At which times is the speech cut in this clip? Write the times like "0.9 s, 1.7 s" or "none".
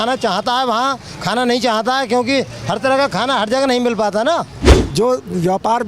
4.8 s